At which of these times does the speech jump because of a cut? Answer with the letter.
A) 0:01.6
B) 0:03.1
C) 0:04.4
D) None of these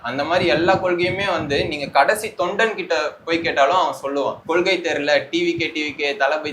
C